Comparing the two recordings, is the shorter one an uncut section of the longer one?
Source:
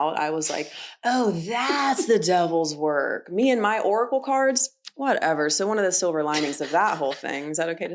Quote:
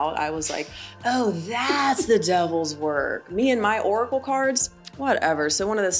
yes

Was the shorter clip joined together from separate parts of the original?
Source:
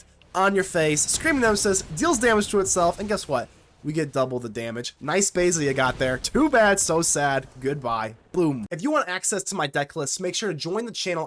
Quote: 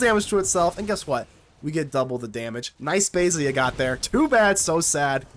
no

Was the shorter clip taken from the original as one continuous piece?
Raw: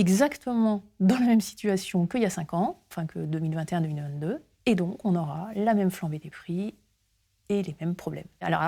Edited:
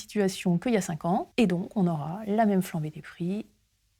no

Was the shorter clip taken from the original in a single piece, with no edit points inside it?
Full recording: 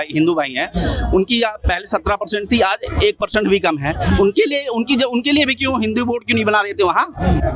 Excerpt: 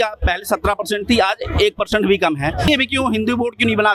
no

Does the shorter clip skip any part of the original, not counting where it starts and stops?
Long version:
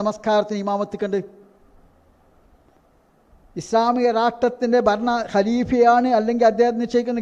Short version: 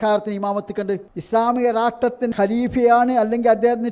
yes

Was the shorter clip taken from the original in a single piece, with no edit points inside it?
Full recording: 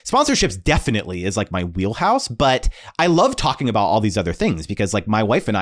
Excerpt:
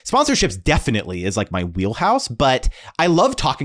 yes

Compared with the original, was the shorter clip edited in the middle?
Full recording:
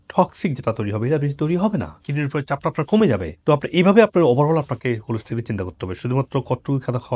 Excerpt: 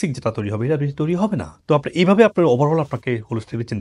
yes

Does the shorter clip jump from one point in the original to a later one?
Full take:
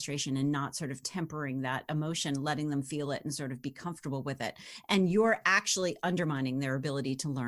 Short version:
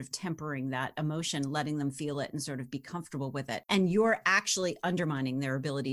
yes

